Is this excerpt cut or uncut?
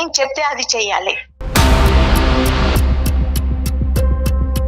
cut